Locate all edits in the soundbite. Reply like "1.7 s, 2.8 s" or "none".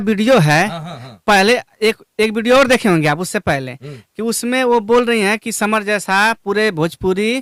none